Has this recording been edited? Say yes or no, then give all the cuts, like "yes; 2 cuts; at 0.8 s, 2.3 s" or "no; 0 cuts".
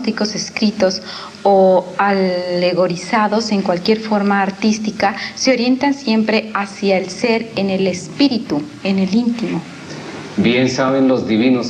no; 0 cuts